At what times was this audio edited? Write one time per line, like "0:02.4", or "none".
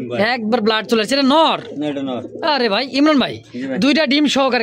none